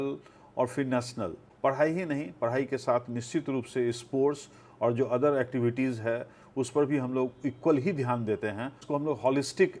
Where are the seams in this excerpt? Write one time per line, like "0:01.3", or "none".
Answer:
0:01.4
0:08.8

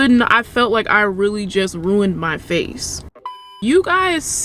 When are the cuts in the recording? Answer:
0:03.5

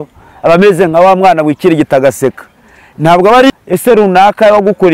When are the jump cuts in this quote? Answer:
0:03.5

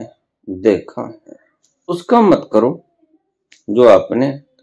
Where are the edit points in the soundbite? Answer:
0:01.9

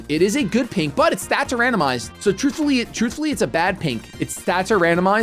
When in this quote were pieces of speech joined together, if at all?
none

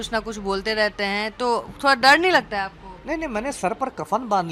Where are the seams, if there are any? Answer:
none

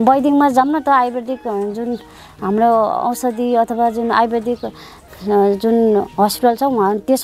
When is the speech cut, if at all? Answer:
none

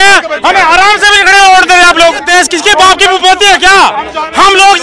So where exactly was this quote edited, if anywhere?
0:02.2

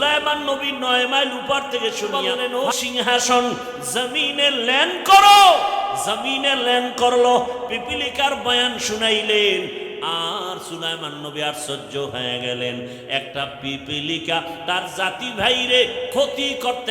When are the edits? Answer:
0:02.2

